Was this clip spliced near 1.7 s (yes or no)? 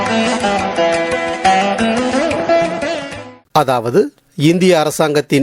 no